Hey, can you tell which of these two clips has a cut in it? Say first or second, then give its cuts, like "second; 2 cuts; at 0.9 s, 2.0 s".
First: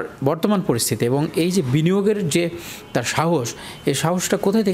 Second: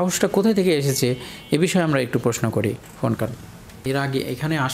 second; 1 cut; at 3.7 s